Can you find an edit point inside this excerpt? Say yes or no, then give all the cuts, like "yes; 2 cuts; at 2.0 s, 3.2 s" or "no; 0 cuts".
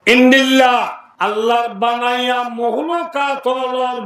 yes; 1 cut; at 1.0 s